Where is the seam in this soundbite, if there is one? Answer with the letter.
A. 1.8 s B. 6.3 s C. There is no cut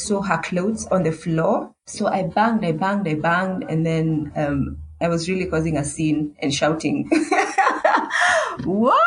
A